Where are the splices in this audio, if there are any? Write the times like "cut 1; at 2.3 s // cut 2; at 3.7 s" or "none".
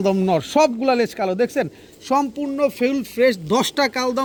none